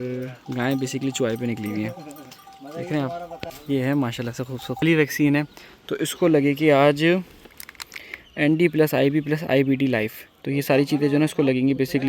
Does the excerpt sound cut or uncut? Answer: cut